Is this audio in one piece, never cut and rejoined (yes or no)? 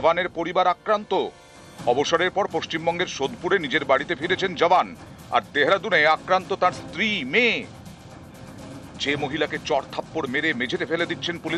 yes